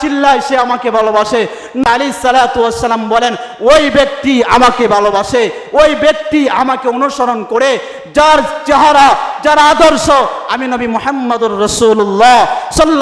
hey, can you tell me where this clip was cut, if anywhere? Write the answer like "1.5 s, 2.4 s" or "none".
1.8 s